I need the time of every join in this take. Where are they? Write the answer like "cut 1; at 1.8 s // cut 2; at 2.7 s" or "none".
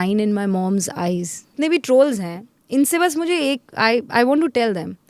cut 1; at 1.5 s